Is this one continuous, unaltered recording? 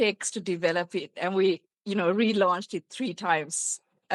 yes; 0 cuts

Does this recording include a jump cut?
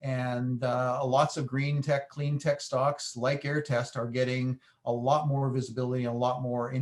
no; 0 cuts

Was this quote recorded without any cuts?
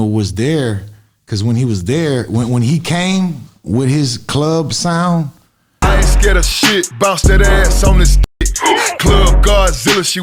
yes; 0 cuts

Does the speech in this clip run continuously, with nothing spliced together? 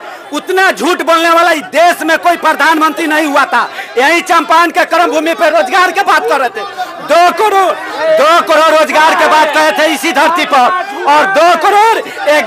yes; 0 cuts

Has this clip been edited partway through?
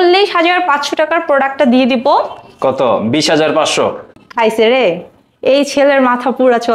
no; 0 cuts

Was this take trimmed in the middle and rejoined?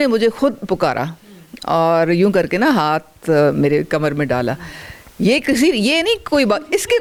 no; 0 cuts

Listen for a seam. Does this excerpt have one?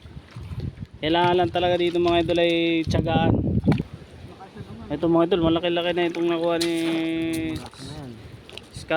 yes; 1 cut; at 3.8 s

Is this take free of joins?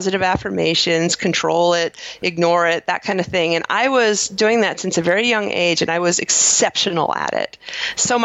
yes; 0 cuts

